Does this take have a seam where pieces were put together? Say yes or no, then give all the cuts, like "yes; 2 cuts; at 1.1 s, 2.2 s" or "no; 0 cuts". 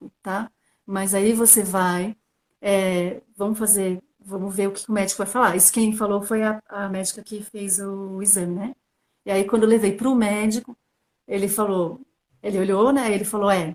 no; 0 cuts